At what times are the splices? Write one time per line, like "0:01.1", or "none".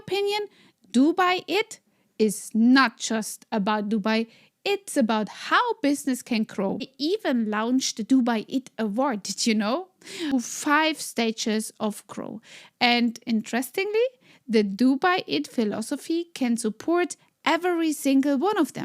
0:06.9
0:10.3

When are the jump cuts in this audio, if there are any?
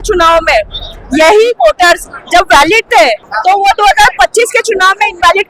0:03.3

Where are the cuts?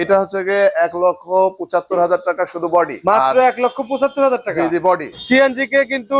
0:02.9
0:05.2

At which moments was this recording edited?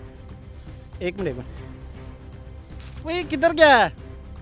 none

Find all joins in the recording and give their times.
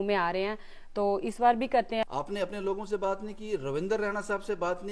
0:02.0

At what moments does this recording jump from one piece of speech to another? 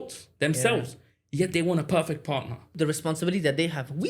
0:02.7

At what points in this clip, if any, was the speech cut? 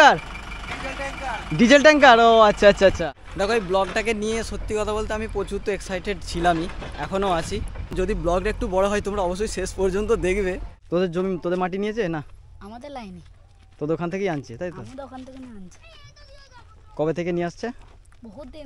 0:03.0
0:07.9
0:10.7

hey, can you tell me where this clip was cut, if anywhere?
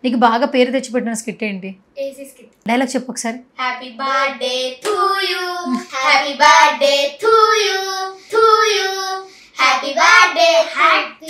0:02.4
0:05.9

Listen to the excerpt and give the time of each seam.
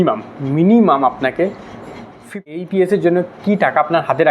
0:02.4

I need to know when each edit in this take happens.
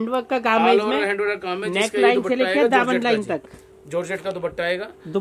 none

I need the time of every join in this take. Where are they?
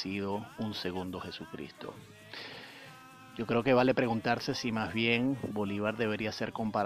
none

